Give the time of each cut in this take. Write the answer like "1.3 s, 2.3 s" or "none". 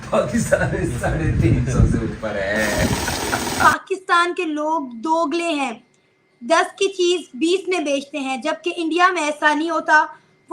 3.6 s